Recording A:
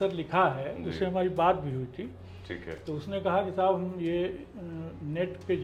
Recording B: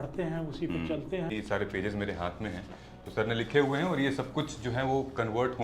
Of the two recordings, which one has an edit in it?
B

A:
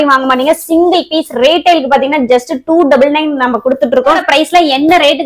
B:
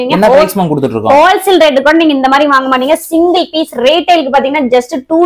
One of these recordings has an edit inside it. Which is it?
A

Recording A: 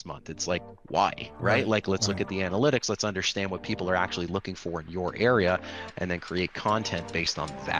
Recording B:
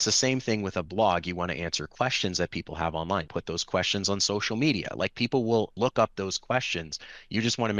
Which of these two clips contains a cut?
B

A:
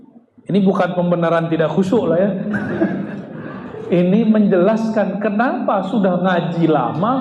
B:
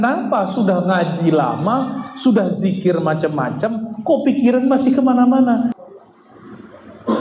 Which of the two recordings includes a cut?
B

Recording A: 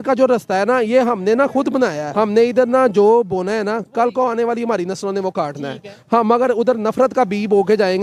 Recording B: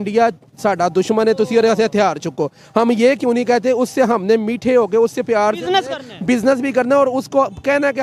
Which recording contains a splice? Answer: A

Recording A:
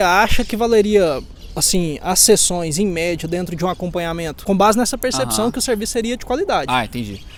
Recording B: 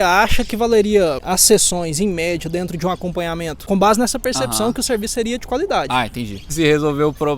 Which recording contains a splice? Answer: B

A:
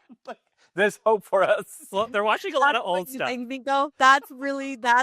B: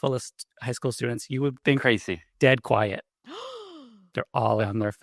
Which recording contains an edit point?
B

